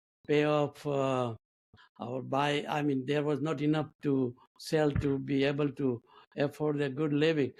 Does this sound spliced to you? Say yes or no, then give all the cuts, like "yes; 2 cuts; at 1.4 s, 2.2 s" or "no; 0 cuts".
no; 0 cuts